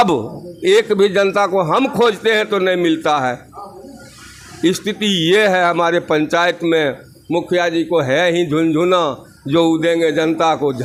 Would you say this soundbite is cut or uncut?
uncut